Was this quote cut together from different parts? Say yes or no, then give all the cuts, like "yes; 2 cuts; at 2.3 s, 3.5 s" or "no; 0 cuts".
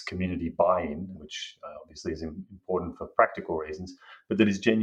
yes; 1 cut; at 1.1 s